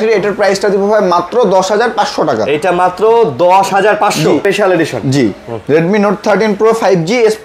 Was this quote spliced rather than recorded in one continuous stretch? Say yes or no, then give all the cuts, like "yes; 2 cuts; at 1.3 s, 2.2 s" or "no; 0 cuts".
yes; 1 cut; at 4.4 s